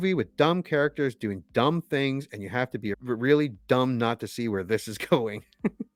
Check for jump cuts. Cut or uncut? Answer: uncut